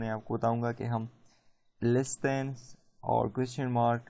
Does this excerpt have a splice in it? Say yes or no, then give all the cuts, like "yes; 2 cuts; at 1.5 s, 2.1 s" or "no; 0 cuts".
yes; 1 cut; at 1.2 s